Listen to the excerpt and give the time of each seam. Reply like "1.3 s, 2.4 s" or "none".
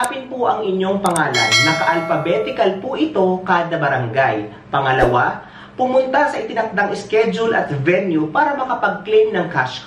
none